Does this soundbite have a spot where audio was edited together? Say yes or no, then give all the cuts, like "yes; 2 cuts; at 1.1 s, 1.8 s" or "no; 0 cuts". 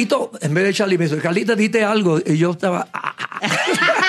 no; 0 cuts